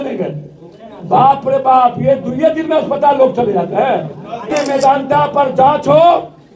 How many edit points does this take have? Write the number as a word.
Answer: one